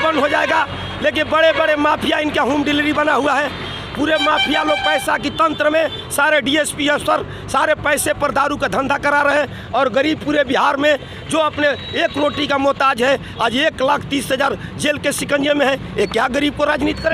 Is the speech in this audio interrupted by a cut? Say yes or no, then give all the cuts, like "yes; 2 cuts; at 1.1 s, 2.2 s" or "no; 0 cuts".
no; 0 cuts